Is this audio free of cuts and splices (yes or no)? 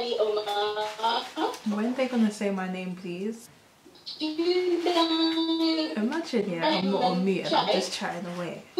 yes